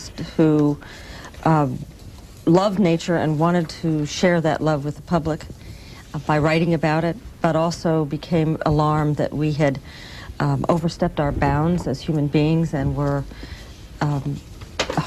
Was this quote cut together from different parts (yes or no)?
no